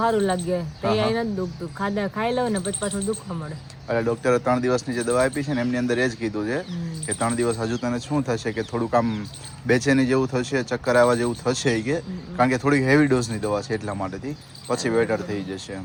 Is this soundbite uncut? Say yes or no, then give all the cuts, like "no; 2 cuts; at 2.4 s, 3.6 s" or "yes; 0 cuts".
yes; 0 cuts